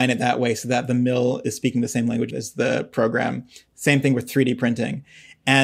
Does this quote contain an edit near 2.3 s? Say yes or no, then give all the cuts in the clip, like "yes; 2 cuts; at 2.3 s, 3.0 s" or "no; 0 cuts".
yes; 1 cut; at 2.3 s